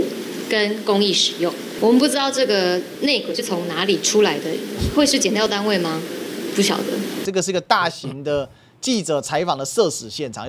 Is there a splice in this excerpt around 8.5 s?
no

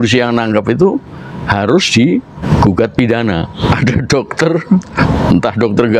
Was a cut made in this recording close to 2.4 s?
yes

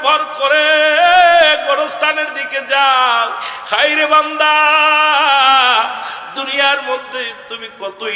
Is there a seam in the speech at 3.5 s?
yes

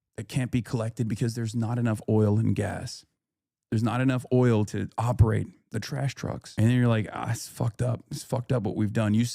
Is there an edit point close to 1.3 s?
no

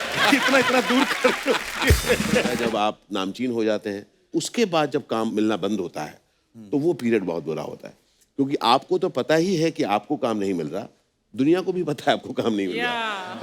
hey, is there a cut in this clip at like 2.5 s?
yes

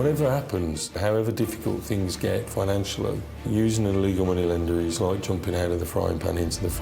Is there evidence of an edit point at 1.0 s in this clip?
yes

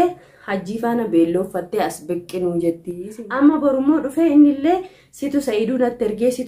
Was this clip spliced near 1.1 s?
no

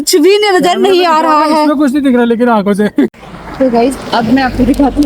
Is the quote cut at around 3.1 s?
yes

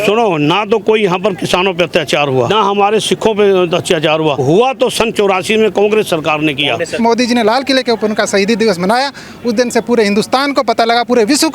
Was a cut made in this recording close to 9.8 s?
no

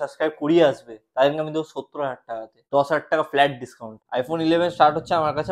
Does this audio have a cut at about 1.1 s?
no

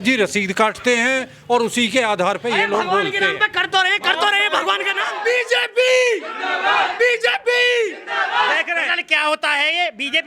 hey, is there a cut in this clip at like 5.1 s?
yes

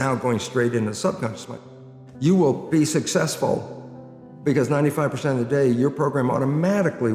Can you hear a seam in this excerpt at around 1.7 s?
yes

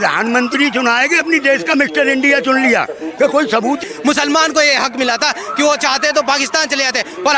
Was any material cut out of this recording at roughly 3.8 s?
yes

